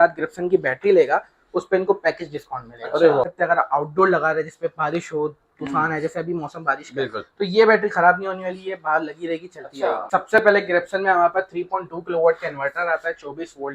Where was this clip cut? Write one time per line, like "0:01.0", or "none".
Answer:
0:03.2
0:10.0